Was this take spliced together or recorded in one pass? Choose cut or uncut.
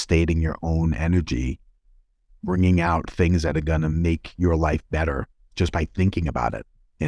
uncut